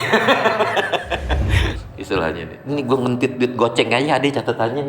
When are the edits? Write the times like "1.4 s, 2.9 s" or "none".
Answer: 1.7 s